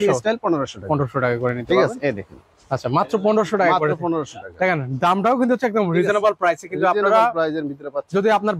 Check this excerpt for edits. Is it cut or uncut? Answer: uncut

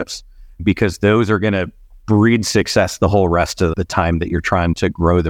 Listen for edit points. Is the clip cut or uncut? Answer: uncut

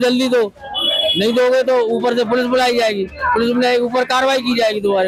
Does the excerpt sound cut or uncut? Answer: uncut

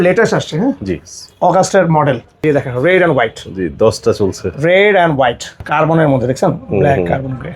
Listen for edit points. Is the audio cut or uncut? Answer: cut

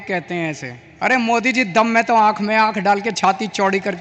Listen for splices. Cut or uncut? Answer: uncut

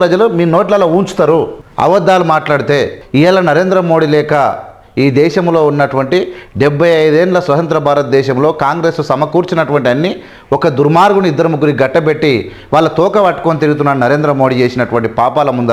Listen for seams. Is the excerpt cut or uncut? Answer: cut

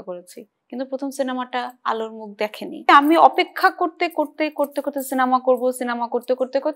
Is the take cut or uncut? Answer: cut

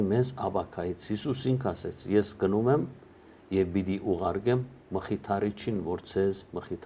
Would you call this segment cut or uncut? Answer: uncut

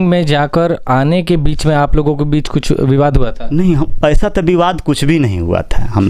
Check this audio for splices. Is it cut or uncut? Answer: uncut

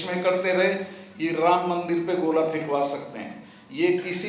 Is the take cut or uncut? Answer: uncut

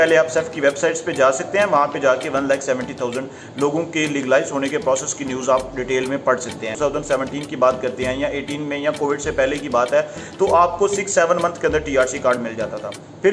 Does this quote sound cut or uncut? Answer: cut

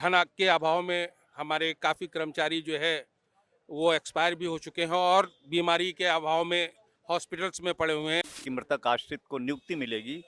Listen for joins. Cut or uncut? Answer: cut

